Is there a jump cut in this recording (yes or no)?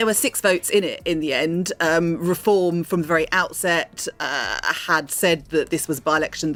no